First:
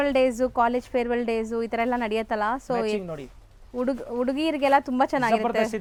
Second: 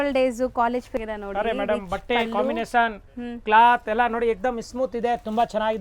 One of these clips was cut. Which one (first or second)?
second